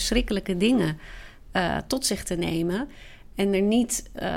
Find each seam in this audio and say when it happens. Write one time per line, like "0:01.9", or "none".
none